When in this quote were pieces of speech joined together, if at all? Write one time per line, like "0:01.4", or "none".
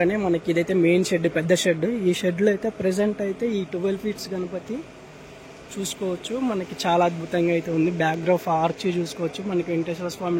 none